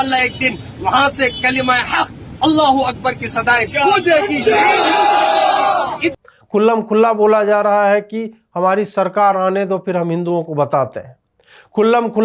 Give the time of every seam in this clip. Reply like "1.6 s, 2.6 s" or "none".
none

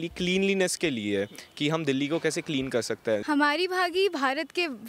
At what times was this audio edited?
3.2 s

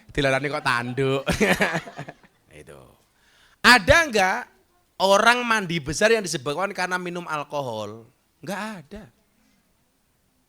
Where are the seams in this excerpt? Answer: 2.2 s

